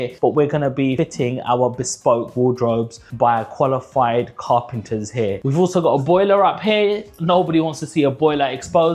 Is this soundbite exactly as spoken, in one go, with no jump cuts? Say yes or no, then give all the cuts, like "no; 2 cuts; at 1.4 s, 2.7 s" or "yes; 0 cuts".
yes; 0 cuts